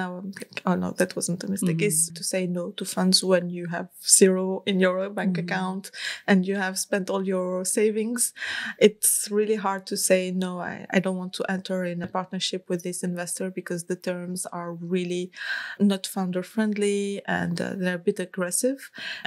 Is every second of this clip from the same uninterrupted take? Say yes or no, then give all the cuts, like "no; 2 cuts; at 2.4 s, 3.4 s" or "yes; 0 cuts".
no; 1 cut; at 2.0 s